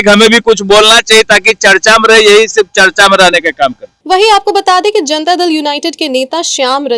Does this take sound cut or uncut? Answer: uncut